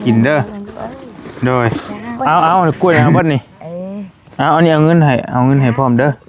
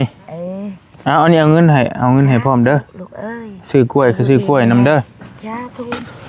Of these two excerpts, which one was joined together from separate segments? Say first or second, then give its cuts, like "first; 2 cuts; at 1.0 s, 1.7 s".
first; 1 cut; at 2.2 s